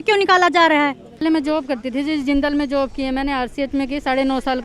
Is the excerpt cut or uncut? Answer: cut